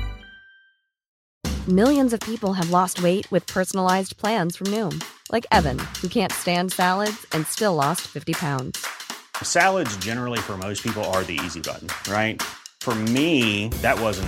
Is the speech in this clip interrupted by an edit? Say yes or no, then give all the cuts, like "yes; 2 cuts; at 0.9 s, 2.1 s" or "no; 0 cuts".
yes; 1 cut; at 1.1 s